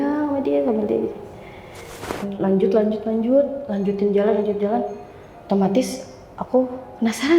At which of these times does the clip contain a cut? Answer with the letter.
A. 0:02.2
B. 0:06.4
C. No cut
A